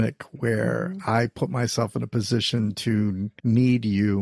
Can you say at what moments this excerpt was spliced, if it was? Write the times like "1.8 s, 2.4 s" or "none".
3.3 s

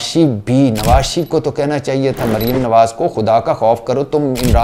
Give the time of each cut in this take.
none

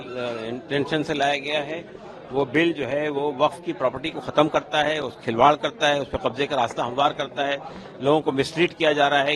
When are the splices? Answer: none

